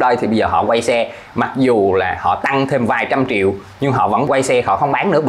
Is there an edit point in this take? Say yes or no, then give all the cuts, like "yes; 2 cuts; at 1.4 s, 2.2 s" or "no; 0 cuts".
yes; 1 cut; at 4.3 s